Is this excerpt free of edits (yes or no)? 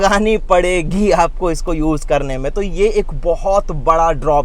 yes